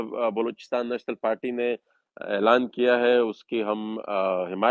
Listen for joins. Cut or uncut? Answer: uncut